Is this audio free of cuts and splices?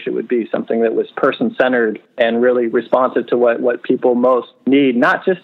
no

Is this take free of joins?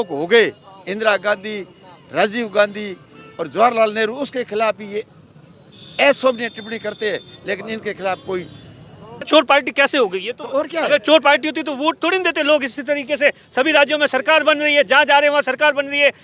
no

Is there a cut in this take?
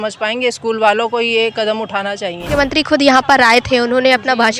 yes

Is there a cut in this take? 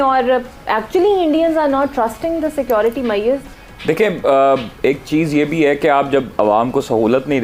no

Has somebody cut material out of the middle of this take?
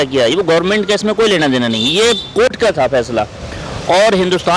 no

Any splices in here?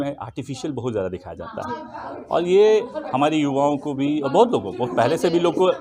no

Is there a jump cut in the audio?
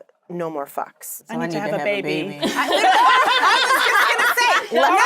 yes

